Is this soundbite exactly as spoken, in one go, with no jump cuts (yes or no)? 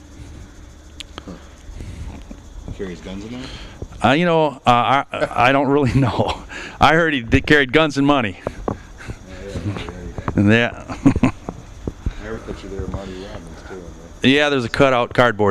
no